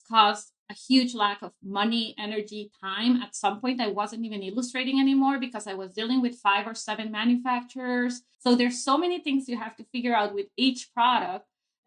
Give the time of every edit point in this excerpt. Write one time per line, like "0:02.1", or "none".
0:08.3